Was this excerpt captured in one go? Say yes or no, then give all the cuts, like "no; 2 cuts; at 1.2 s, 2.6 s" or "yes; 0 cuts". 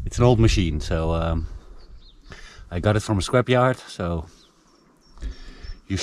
yes; 0 cuts